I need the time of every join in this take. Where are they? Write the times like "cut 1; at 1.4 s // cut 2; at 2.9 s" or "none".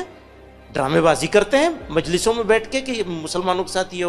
none